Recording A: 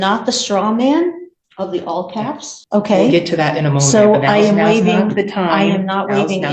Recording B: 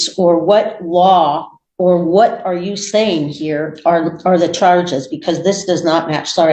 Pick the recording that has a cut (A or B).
A